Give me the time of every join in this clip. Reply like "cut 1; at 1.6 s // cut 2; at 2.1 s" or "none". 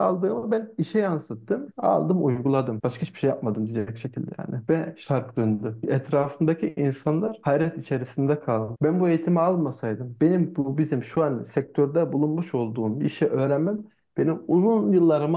cut 1; at 1.6 s // cut 2; at 2.7 s // cut 3; at 5.8 s // cut 4; at 8.7 s